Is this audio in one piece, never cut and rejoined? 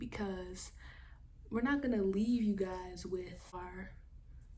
no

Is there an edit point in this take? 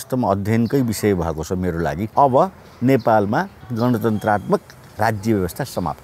yes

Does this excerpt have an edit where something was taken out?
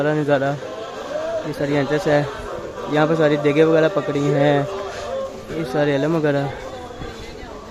no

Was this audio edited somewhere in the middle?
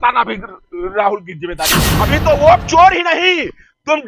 yes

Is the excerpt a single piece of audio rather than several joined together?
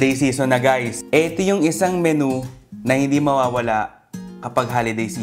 no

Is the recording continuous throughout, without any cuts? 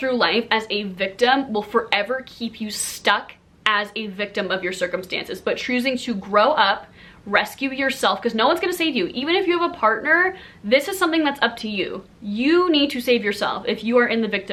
yes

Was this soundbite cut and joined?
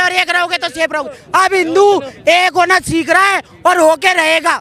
no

